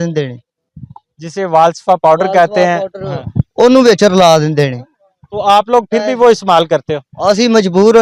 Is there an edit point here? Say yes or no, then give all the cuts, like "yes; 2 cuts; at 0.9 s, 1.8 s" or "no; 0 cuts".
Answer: no; 0 cuts